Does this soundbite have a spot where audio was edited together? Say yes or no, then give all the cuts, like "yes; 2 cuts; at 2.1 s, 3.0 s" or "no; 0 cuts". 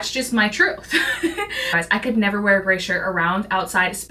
yes; 1 cut; at 1.6 s